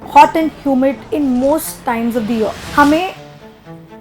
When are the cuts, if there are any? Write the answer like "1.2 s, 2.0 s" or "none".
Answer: 1.0 s, 2.6 s